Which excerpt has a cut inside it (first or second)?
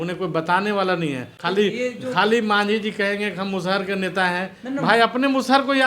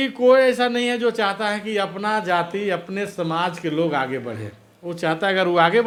first